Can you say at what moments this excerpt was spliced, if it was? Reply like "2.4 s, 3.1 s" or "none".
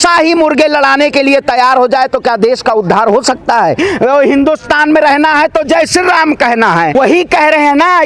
3.8 s, 7.0 s